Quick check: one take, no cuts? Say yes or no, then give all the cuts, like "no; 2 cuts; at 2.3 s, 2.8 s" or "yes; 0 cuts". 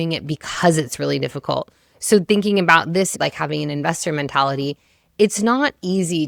yes; 0 cuts